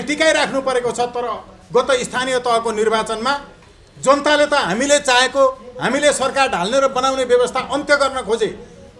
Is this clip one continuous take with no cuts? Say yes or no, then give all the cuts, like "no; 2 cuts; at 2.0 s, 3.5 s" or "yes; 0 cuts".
yes; 0 cuts